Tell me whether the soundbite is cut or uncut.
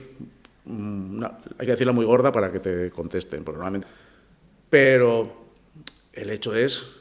cut